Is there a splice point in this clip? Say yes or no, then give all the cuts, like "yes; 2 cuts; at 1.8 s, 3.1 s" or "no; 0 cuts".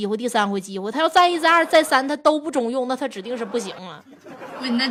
no; 0 cuts